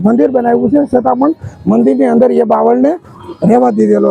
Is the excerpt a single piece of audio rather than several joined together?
yes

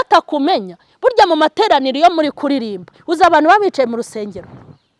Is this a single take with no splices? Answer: yes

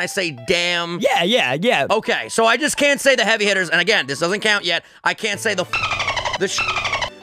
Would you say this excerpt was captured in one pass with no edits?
no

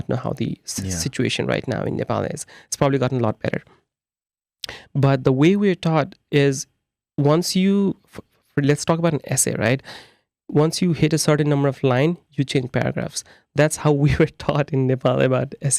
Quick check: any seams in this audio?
no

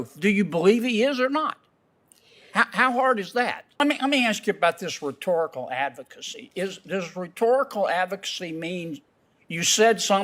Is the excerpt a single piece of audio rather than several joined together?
no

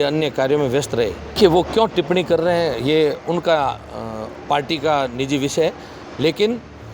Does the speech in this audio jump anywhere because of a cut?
yes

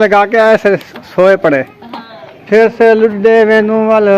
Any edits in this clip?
yes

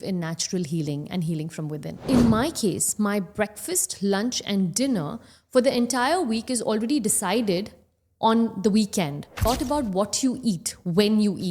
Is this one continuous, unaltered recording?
no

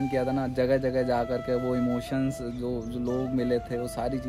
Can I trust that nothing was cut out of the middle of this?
yes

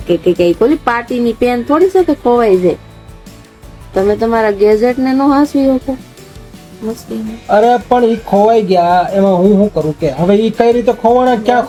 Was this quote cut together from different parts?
no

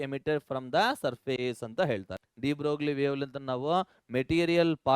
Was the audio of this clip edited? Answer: yes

